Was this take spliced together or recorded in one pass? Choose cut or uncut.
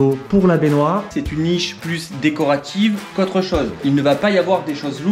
cut